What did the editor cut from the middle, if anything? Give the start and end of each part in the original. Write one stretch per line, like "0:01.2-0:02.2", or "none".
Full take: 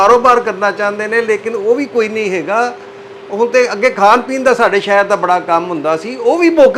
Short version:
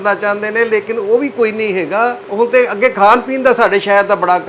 0:02.8-0:03.2